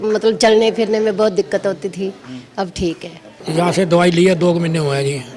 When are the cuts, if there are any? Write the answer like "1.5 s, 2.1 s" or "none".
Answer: 3.3 s